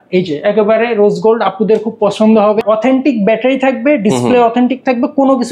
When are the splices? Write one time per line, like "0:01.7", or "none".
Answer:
0:02.6

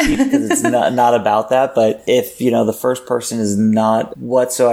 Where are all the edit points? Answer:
0:02.0

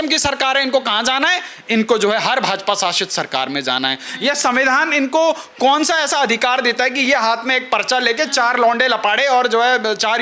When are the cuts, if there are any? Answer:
0:04.1

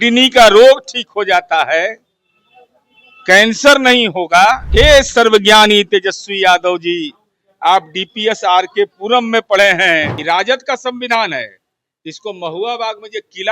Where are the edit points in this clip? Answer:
0:04.6
0:10.1

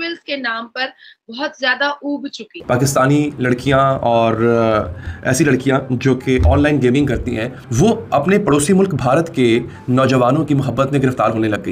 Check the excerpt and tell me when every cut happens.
0:02.6

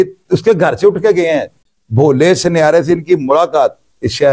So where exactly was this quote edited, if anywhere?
0:01.5

